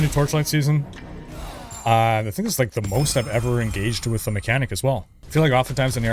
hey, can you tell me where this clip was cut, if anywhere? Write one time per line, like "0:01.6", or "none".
0:01.5
0:05.2